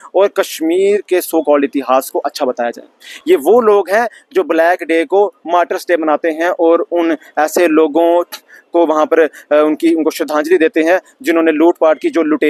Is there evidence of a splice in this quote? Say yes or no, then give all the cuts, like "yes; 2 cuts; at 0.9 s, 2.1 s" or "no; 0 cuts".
no; 0 cuts